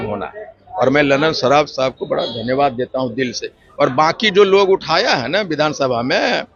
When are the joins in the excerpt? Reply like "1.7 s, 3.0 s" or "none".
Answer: none